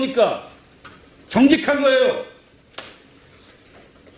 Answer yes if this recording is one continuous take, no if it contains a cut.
yes